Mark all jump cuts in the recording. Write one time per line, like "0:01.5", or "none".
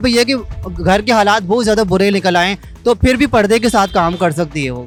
none